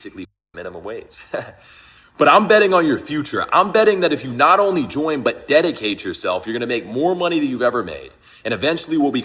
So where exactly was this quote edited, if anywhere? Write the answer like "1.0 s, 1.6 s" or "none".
none